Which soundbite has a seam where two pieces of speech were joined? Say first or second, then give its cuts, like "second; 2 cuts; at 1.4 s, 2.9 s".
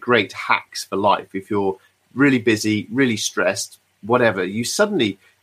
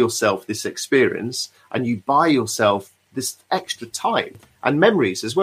second; 1 cut; at 4.4 s